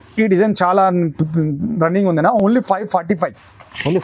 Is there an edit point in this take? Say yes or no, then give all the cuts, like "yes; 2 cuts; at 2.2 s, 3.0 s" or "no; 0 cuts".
no; 0 cuts